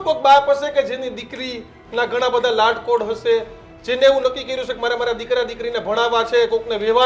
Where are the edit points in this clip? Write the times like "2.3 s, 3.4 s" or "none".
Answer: none